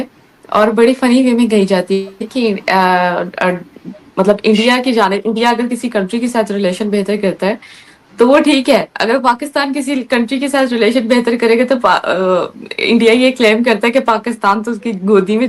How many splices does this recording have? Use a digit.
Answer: 0